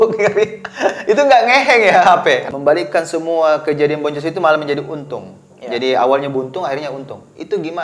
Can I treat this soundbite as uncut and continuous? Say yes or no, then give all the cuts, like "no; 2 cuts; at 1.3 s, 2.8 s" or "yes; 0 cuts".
no; 1 cut; at 2.5 s